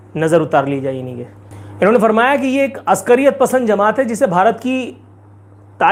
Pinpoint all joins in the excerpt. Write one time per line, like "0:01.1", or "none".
none

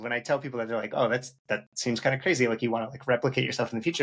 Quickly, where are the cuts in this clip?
none

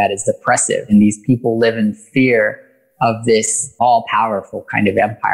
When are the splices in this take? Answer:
0:00.9
0:03.7

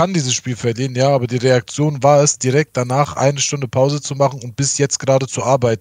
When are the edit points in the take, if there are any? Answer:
none

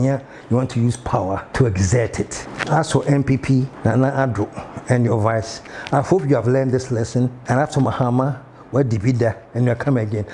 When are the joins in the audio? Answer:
0:01.5
0:02.5
0:03.7
0:07.4

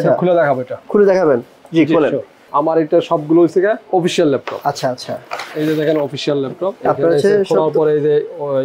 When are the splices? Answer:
0:02.4

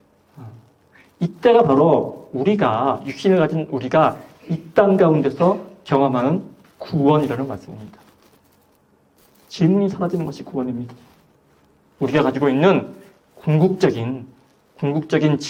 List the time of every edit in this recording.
none

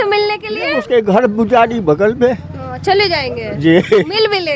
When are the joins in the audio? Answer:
none

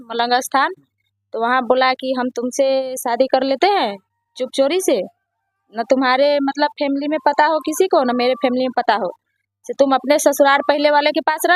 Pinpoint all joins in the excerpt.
none

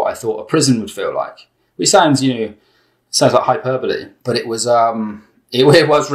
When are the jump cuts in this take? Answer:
0:04.1

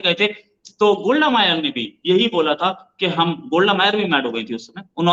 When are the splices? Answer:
none

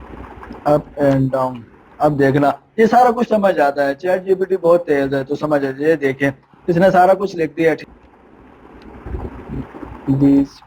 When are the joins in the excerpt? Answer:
0:07.8

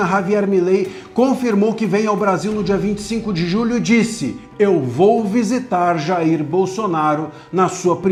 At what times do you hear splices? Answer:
none

